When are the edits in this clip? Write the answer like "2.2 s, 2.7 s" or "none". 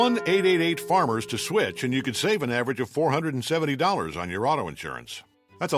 1.2 s